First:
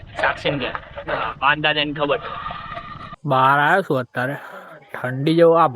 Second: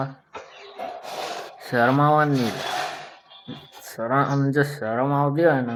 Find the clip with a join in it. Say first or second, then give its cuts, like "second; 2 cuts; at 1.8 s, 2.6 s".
first; 1 cut; at 3.2 s